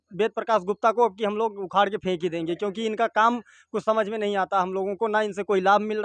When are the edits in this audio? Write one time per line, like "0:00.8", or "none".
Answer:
none